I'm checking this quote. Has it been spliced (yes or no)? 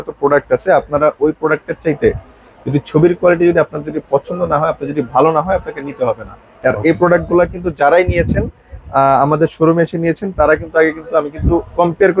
no